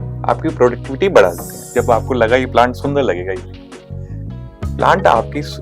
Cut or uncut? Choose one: cut